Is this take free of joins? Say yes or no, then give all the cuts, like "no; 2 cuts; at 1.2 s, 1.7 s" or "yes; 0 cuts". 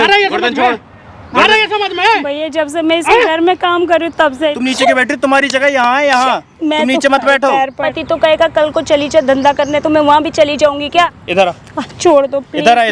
no; 3 cuts; at 4.4 s, 7.9 s, 11.2 s